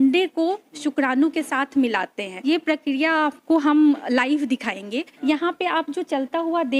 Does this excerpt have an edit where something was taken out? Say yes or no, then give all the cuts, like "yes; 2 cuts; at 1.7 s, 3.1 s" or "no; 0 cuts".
yes; 2 cuts; at 2.3 s, 5.2 s